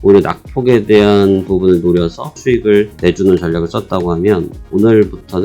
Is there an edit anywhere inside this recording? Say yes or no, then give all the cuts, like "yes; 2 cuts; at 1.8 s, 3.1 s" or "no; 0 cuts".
yes; 1 cut; at 2.5 s